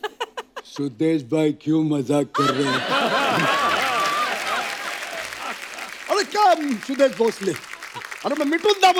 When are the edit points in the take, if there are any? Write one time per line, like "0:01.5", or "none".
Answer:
none